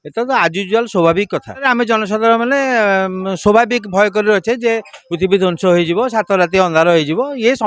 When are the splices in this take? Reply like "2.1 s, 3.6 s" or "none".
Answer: 1.6 s